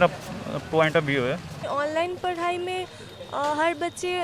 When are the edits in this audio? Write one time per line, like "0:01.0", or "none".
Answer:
0:01.6